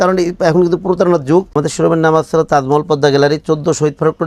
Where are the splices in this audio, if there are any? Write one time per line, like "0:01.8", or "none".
0:01.5